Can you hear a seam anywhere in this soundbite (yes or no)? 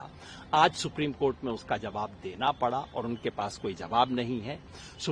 no